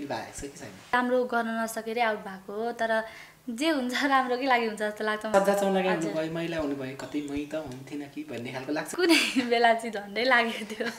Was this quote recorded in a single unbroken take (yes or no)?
no